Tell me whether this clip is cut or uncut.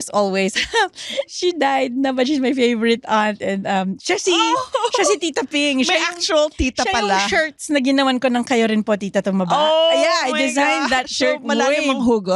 uncut